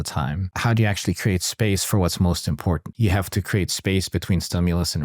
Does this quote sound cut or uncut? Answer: cut